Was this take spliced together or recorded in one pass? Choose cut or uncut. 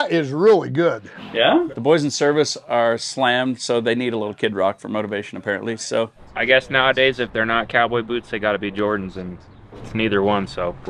cut